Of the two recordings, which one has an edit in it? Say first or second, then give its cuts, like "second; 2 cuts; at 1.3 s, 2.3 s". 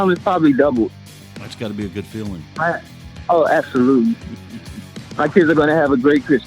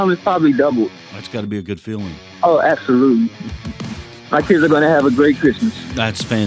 second; 2 cuts; at 1.1 s, 2.2 s